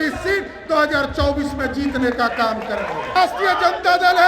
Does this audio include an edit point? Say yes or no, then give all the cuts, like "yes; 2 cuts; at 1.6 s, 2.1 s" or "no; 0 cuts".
yes; 1 cut; at 3.2 s